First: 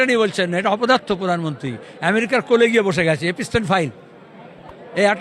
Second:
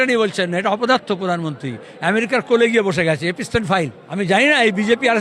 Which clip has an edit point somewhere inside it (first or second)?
second